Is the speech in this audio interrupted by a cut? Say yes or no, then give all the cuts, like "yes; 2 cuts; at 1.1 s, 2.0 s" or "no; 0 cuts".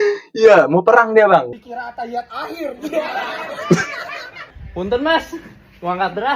yes; 1 cut; at 1.5 s